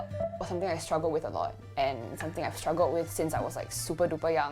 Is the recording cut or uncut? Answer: uncut